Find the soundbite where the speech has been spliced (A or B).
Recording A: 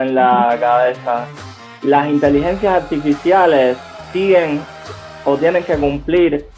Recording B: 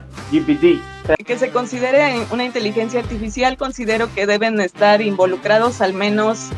B